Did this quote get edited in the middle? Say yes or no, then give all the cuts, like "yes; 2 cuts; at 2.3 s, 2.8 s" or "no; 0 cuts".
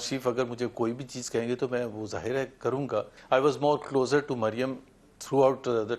yes; 1 cut; at 3.2 s